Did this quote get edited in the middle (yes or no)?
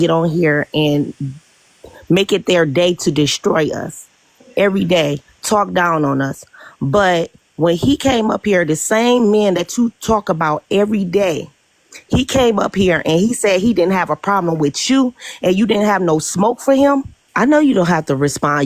yes